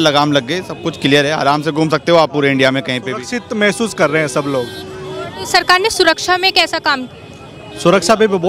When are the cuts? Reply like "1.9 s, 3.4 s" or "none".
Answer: none